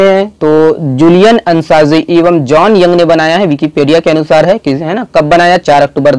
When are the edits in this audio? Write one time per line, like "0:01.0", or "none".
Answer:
none